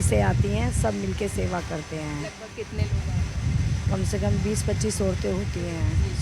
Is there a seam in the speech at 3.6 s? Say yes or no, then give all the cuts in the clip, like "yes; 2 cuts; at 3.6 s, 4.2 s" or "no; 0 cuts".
no; 0 cuts